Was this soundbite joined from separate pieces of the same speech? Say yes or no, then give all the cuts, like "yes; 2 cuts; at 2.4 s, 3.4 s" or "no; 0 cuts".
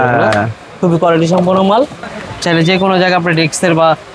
yes; 1 cut; at 2.0 s